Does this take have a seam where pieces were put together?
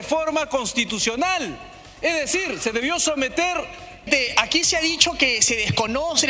yes; 1 cut; at 4.1 s

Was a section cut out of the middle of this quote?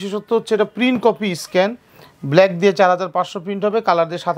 no; 0 cuts

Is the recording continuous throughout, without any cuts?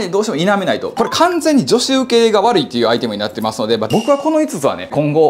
no; 2 cuts; at 0.9 s, 3.9 s

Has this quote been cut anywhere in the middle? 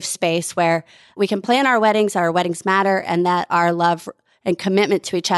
yes; 1 cut; at 1.2 s

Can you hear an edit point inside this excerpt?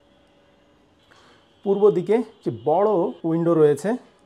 yes; 2 cuts; at 1.0 s, 3.2 s

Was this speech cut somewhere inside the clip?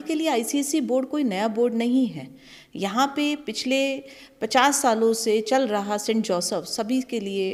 no; 0 cuts

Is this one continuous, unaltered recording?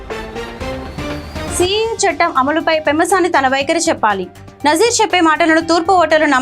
no; 1 cut; at 1.5 s

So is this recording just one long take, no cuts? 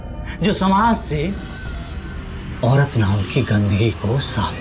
yes; 0 cuts

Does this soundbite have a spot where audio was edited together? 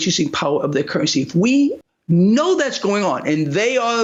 no; 0 cuts

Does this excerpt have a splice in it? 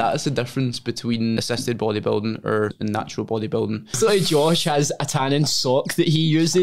yes; 3 cuts; at 1.4 s, 2.8 s, 4.0 s

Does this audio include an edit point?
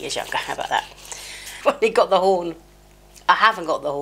yes; 1 cut; at 1.6 s

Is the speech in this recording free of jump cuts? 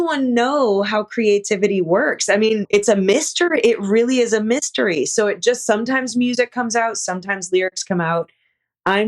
no; 1 cut; at 2.7 s

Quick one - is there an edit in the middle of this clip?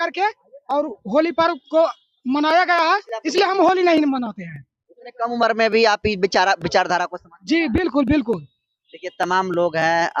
no; 0 cuts

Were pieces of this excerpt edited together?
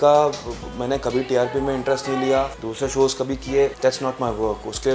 no; 0 cuts

